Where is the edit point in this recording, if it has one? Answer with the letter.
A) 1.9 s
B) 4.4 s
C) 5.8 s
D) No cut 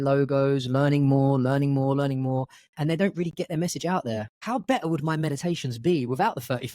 B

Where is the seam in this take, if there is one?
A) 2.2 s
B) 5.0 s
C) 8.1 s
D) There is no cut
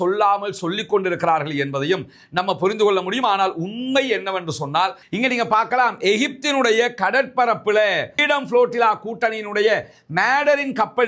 B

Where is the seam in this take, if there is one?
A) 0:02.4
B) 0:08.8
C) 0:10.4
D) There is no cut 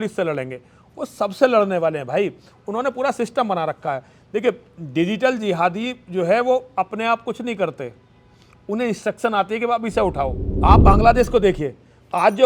C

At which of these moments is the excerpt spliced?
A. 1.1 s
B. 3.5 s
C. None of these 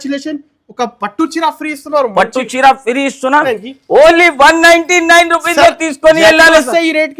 B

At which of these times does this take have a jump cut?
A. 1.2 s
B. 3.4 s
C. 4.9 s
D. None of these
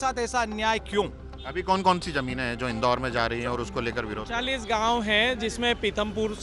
D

